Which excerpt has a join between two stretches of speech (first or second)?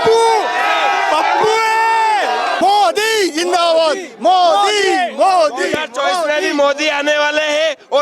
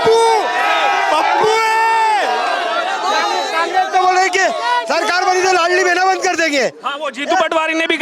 first